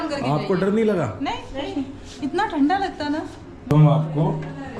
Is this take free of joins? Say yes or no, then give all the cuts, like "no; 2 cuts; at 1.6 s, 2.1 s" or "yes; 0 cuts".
no; 1 cut; at 3.7 s